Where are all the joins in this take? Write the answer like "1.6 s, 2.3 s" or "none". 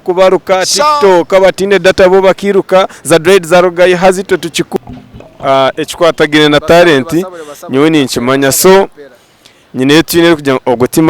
4.7 s